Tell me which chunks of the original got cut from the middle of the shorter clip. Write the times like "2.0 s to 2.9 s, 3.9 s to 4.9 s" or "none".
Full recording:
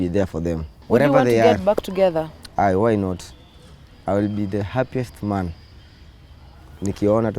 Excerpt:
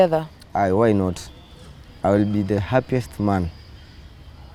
none